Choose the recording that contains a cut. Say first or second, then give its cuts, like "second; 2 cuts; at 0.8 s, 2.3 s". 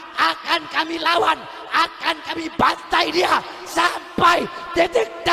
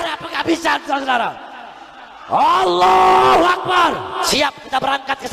second; 1 cut; at 4.3 s